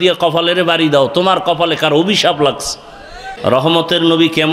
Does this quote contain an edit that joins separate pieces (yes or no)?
yes